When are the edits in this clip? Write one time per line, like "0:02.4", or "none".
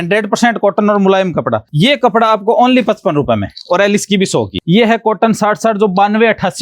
0:01.6
0:04.6